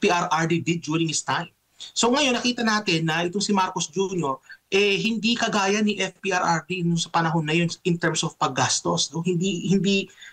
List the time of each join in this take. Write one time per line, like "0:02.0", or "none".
none